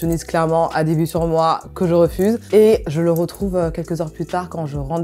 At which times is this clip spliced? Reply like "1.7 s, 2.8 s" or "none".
none